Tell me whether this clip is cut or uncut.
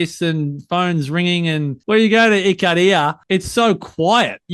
cut